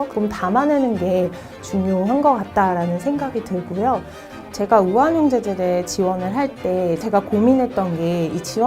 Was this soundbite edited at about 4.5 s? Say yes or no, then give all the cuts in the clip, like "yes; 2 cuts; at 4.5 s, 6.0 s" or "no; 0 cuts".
no; 1 cut; at 7.0 s